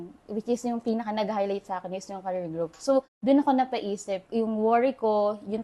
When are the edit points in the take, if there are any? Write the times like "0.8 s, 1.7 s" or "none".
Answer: none